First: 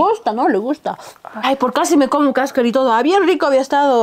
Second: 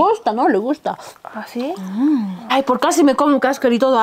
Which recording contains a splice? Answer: first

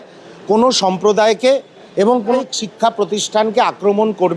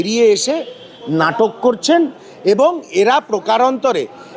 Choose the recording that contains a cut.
first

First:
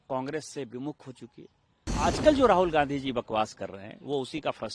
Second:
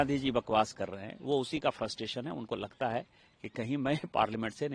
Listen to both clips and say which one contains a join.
first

